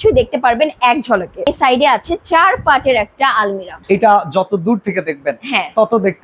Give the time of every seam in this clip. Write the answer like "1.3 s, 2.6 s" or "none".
1.5 s, 3.8 s